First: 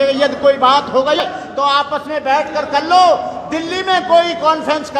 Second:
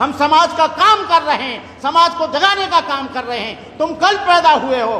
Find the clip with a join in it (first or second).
first